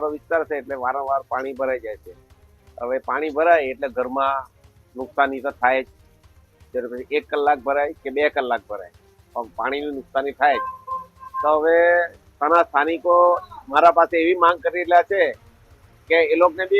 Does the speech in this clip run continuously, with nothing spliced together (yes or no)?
yes